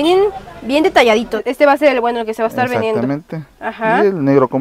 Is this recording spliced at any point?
yes; 1 cut; at 1.4 s

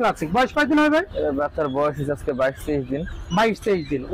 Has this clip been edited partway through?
no; 0 cuts

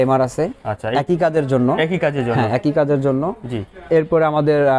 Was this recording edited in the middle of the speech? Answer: no; 0 cuts

